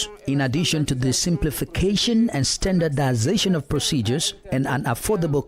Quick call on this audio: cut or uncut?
cut